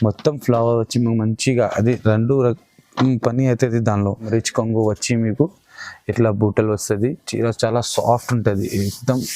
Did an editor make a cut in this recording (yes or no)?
yes